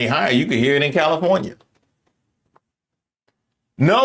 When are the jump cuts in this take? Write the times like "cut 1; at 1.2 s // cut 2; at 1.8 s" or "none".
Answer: none